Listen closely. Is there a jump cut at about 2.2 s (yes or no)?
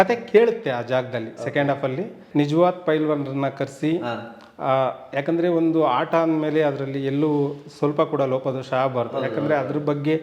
yes